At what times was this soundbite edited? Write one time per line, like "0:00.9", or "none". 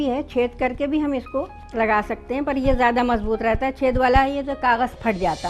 0:01.6